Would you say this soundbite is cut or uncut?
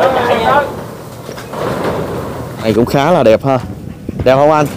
cut